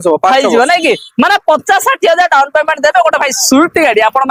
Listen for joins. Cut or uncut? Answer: uncut